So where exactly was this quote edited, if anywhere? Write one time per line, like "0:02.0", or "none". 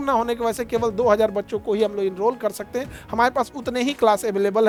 none